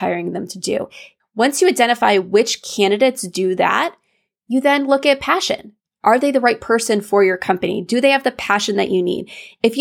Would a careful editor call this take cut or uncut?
cut